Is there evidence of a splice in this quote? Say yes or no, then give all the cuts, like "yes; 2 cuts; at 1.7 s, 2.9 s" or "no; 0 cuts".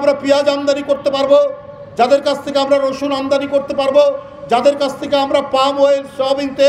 no; 0 cuts